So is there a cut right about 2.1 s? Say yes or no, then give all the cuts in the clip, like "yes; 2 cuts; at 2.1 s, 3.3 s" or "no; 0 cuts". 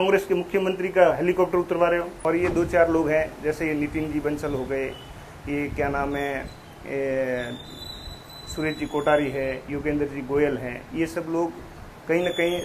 yes; 1 cut; at 2.1 s